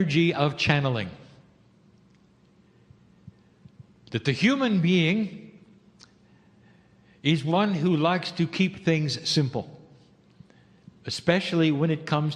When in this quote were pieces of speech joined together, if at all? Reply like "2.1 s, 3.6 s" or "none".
none

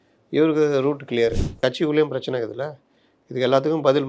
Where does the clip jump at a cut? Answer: 1.6 s

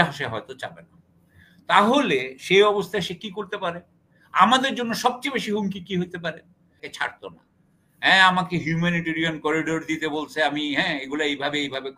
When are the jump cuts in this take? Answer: 6.9 s

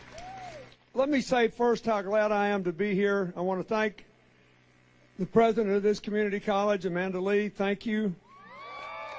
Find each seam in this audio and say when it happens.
3.6 s

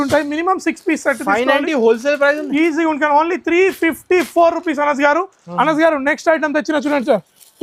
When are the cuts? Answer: none

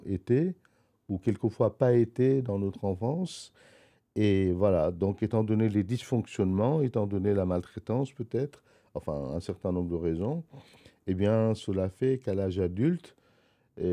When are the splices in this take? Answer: none

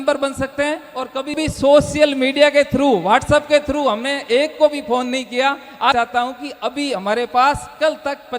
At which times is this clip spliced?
1.4 s, 5.9 s

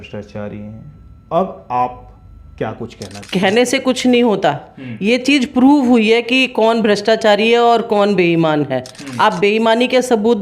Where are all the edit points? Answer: 3.1 s

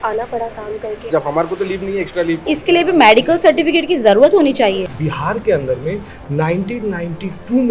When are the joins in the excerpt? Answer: 1.1 s, 2.5 s, 4.9 s

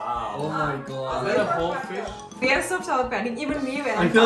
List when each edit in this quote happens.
2.4 s

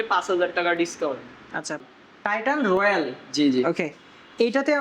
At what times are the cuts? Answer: 1.8 s

